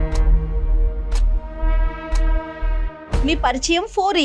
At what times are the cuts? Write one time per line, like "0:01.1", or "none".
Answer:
0:03.0